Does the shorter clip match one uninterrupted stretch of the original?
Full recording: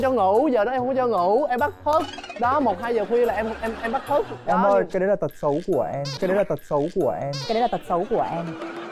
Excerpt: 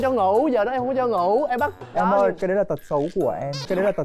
no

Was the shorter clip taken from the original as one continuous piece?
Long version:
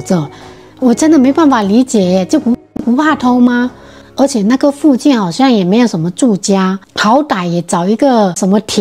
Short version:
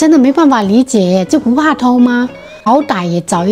no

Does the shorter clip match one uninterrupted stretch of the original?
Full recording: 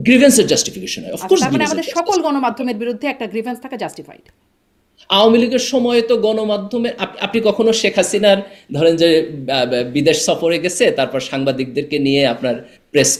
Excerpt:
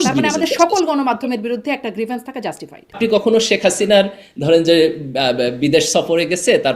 no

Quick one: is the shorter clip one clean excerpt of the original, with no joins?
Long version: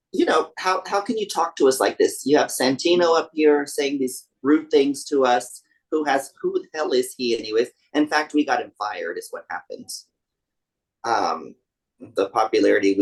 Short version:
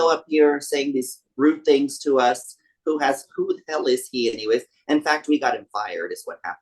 yes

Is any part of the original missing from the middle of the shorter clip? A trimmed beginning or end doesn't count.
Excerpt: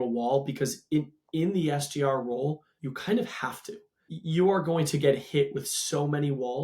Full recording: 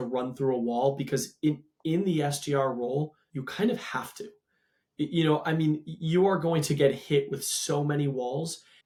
yes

